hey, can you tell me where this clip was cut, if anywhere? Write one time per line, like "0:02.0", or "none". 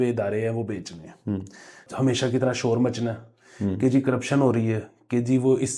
0:01.8